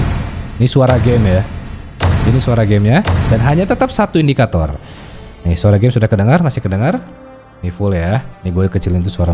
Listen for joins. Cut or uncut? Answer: uncut